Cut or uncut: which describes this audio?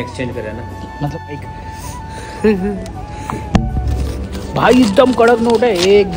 cut